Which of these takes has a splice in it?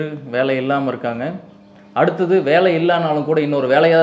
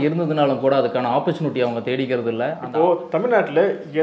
second; 1 cut; at 2.6 s

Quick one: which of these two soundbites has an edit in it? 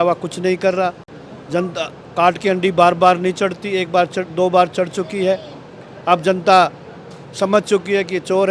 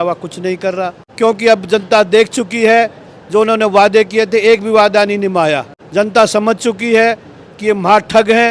second; 2 cuts; at 1.0 s, 5.8 s

